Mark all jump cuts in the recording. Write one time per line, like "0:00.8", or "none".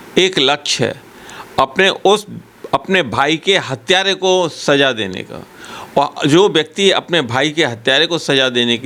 none

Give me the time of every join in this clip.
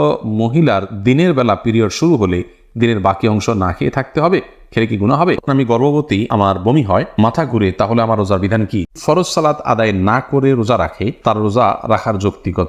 0:05.4
0:08.9

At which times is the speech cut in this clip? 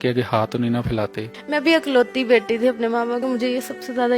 0:01.3
0:03.2

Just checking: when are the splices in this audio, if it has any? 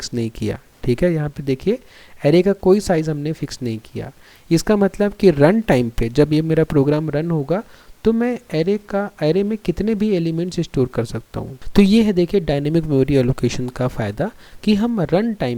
0:11.5

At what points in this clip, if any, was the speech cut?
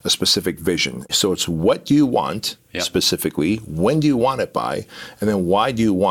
0:01.0

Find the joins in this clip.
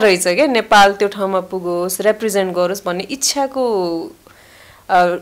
none

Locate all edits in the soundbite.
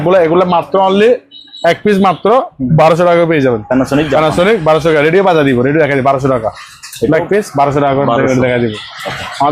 none

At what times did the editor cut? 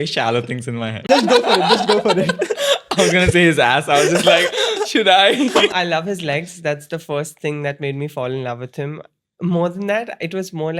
0:01.1
0:05.7

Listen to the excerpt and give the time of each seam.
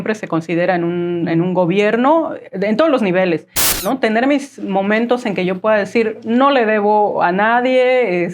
0:03.8

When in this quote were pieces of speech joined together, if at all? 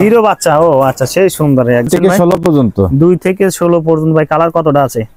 0:01.9

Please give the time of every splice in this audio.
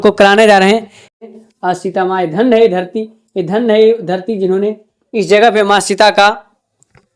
0:01.2

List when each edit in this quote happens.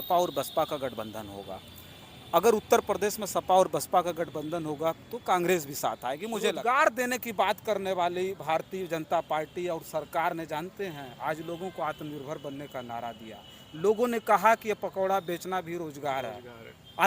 0:06.5

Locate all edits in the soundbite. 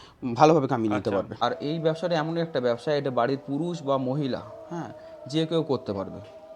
0:01.3

